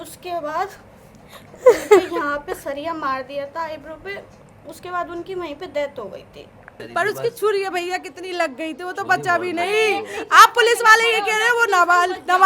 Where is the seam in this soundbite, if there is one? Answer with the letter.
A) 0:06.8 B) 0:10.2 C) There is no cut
A